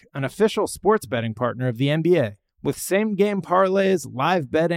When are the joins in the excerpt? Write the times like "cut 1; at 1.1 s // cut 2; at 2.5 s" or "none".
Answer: none